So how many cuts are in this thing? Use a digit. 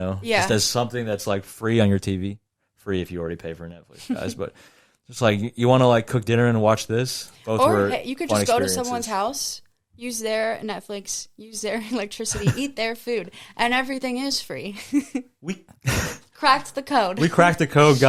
0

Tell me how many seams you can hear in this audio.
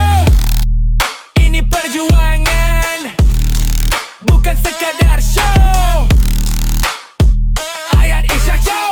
0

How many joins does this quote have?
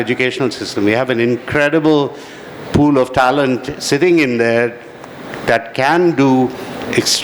0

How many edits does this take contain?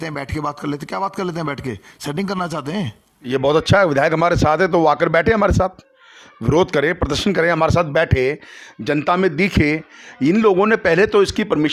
1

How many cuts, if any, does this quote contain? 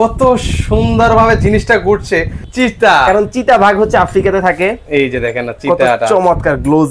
1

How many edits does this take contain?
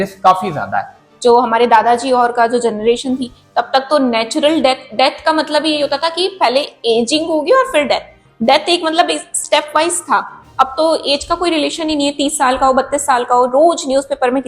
1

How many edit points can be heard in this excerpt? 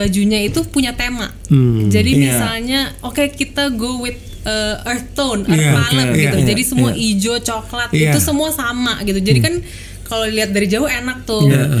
0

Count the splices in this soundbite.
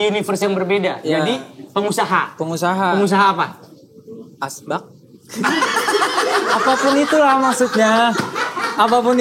0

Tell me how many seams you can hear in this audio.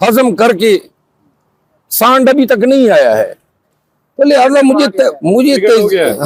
0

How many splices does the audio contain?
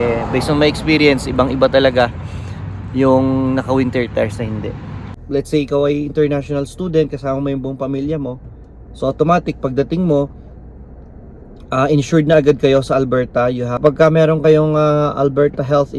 2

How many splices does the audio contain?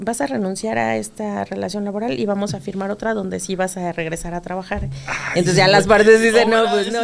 0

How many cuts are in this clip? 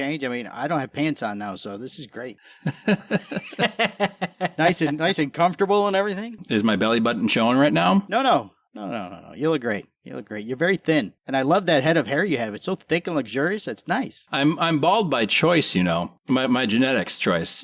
3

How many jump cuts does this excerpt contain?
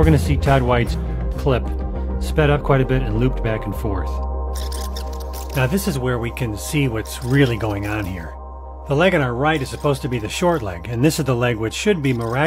1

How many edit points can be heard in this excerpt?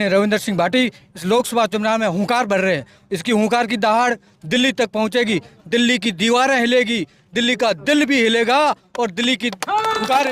0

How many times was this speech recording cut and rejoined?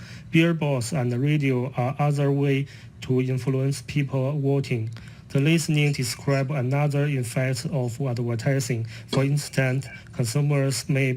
1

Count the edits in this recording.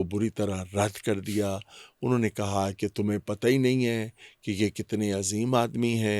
0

